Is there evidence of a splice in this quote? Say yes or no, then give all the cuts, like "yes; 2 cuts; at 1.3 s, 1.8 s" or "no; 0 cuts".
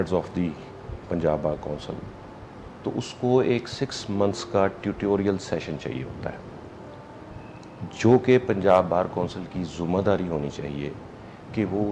no; 0 cuts